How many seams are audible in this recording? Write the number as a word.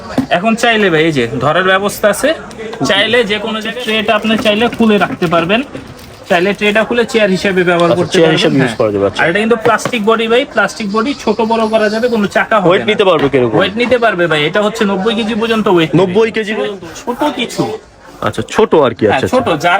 two